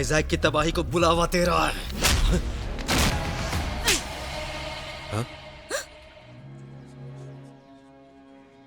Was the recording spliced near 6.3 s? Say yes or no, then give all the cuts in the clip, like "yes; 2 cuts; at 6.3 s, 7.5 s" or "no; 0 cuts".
yes; 3 cuts; at 3.1 s, 6.3 s, 7.4 s